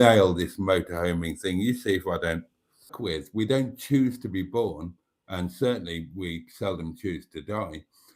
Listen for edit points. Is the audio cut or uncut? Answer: cut